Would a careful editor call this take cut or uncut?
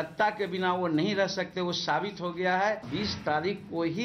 cut